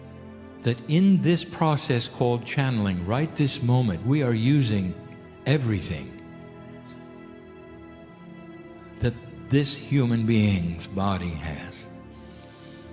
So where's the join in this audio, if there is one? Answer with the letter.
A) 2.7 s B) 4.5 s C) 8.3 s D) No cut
B